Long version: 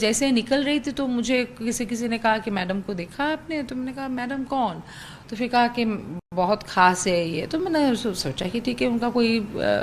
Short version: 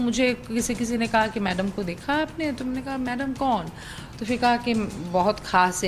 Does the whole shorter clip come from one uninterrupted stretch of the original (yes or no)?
no